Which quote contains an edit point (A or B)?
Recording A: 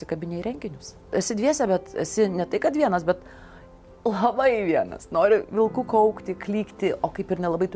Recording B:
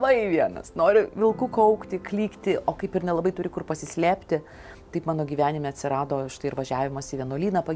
A